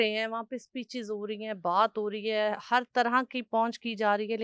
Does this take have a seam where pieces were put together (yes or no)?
no